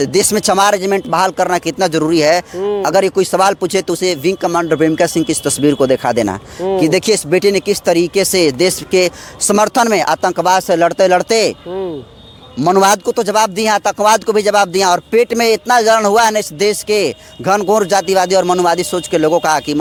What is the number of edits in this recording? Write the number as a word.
zero